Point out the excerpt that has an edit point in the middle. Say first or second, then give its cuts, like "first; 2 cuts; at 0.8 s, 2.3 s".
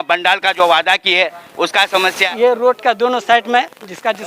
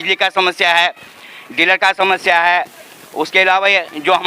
first; 1 cut; at 2.3 s